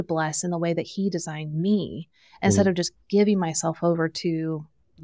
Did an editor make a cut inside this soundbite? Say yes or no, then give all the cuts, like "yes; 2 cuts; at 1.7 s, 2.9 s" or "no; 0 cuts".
no; 0 cuts